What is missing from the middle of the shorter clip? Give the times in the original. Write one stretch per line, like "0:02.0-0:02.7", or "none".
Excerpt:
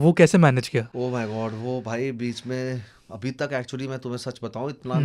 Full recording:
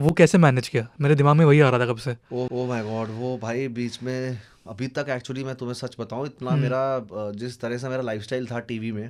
0:00.9-0:02.5

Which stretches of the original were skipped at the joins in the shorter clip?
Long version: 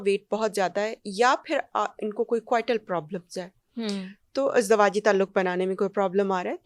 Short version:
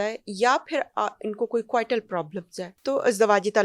0:03.5-0:04.2

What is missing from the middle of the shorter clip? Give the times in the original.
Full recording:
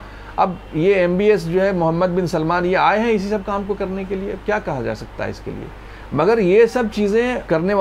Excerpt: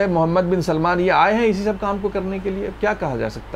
none

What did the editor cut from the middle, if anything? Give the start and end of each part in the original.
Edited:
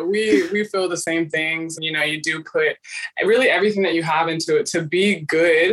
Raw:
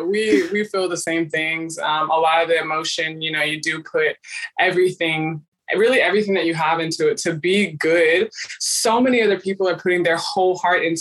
0:01.7-0:03.1
0:04.4-0:05.5

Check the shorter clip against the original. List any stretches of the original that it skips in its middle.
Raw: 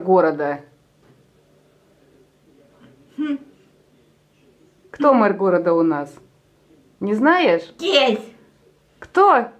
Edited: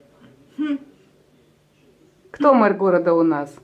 none

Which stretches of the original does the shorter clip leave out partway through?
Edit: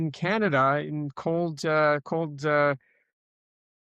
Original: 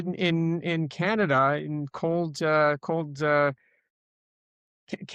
none

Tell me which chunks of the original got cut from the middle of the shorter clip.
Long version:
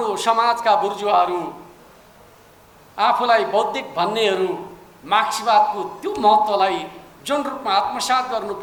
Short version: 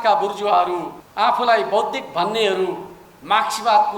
0:01.6-0:02.8

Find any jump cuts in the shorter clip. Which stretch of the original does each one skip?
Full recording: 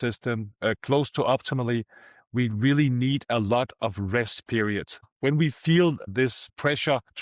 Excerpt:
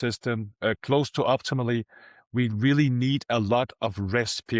none

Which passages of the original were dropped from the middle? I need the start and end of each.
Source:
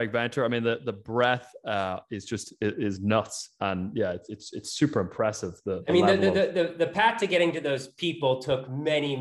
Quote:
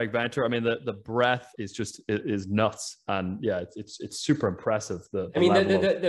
0:01.5-0:02.1

